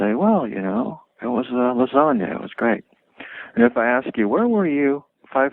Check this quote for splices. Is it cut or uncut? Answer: uncut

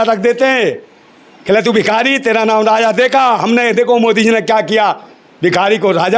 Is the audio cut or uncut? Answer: uncut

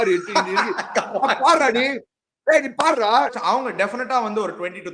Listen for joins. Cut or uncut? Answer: cut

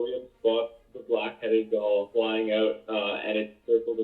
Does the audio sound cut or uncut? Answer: uncut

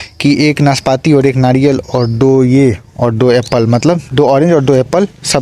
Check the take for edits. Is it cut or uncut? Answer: uncut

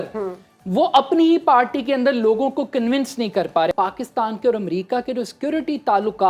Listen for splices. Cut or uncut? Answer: cut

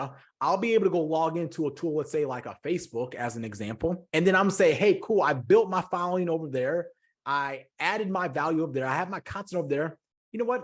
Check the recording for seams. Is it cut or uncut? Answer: uncut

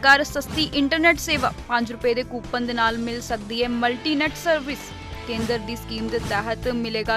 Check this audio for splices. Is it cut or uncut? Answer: uncut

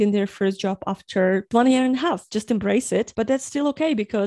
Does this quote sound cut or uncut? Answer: cut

